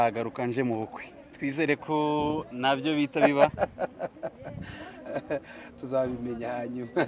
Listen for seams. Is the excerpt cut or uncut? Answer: uncut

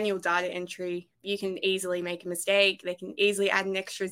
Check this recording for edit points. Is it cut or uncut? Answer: cut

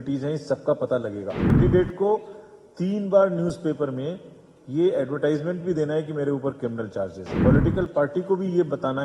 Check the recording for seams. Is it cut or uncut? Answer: cut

